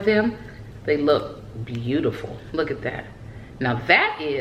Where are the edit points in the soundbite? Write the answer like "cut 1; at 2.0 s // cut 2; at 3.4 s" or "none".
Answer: none